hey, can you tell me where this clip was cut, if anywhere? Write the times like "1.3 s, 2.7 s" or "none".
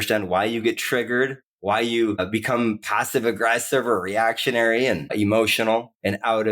1.5 s, 2.2 s, 5.1 s